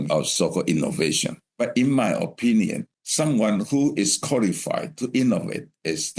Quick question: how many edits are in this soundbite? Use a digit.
2